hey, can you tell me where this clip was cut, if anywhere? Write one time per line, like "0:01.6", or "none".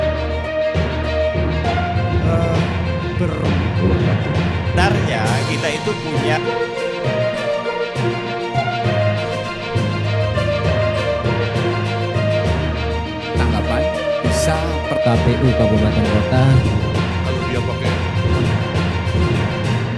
none

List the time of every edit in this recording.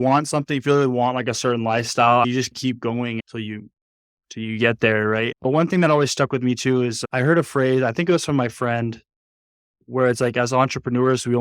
none

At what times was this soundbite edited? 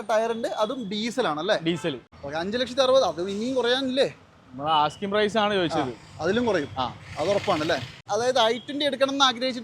0:02.1
0:08.0

